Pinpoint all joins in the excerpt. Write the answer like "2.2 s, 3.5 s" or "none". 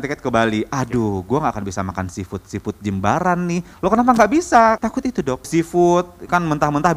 5.3 s